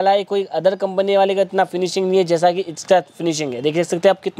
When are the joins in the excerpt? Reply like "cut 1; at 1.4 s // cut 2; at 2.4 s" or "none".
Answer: none